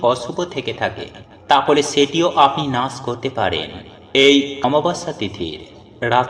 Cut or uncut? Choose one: cut